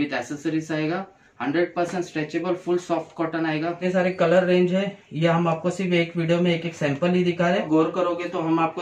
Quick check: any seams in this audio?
yes; 2 cuts; at 3.8 s, 7.7 s

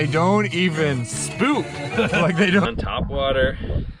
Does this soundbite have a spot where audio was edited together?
yes; 1 cut; at 2.6 s

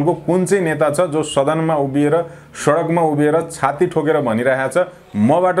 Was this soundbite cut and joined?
no; 0 cuts

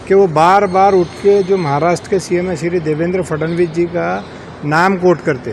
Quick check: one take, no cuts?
yes; 0 cuts

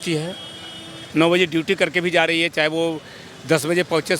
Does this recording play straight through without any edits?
yes; 0 cuts

